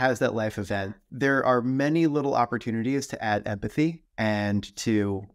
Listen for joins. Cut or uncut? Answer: cut